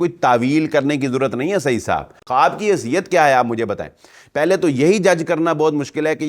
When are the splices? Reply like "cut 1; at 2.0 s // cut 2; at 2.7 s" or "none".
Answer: cut 1; at 2.2 s